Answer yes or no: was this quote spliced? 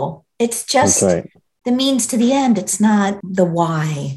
yes